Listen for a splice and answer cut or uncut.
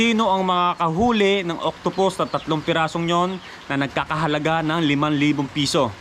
uncut